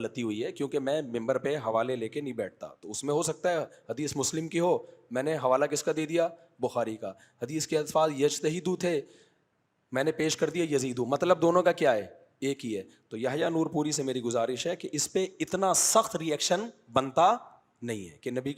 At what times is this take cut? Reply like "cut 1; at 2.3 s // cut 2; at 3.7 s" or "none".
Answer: none